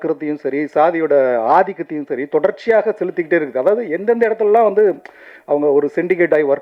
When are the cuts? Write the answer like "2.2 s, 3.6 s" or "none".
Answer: none

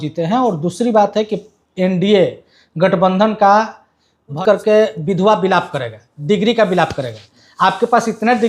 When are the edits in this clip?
4.4 s

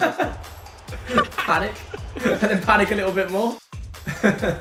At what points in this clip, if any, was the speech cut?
none

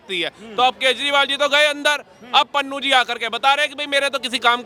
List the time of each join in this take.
none

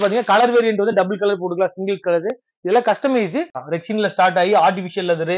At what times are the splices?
3.6 s

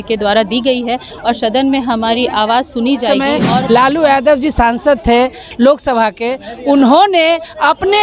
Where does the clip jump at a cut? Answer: 3.1 s

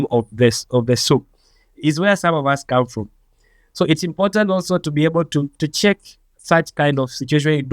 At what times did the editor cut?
none

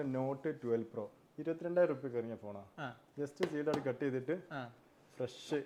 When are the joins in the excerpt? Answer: none

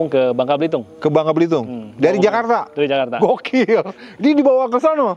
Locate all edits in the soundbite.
none

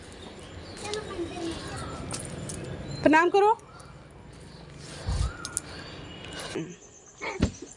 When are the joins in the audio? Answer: 6.7 s

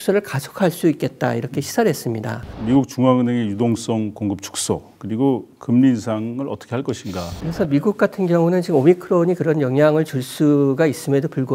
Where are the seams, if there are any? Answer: 2.5 s, 7.4 s

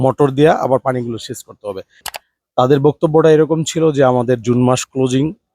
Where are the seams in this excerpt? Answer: 2.1 s

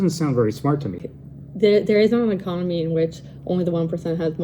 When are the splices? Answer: 1.0 s

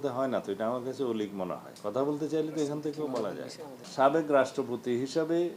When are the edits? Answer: 1.7 s, 3.8 s

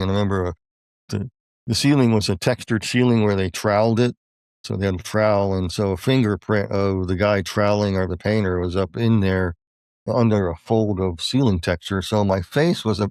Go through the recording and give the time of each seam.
none

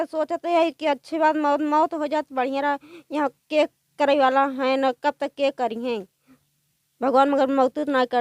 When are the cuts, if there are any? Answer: none

